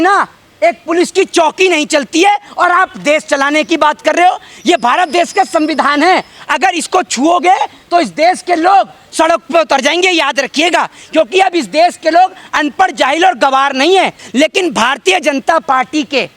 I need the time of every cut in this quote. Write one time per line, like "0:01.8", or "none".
0:14.2